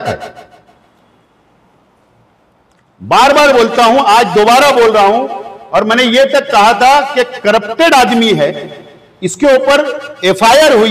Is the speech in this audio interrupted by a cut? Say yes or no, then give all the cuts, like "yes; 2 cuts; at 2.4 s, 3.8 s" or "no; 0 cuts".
no; 0 cuts